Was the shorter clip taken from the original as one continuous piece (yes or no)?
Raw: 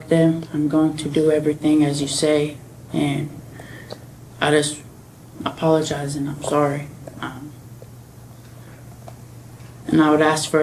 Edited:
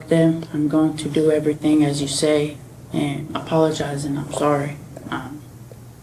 no